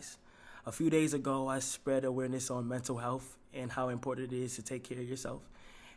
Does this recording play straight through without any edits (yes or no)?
yes